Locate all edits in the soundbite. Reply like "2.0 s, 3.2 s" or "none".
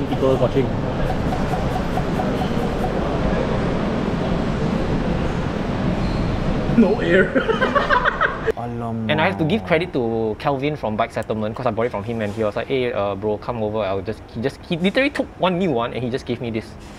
none